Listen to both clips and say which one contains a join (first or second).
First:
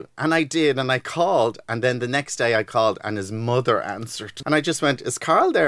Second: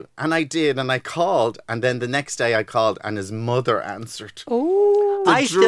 first